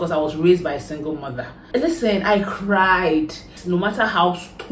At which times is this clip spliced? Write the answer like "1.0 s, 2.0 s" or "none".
1.6 s, 3.5 s